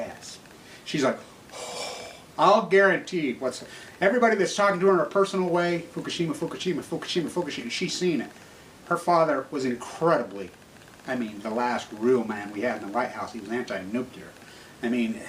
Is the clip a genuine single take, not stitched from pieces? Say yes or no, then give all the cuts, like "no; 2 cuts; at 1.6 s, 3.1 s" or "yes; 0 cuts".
yes; 0 cuts